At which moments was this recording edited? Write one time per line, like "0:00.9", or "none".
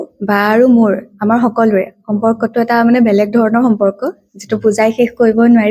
none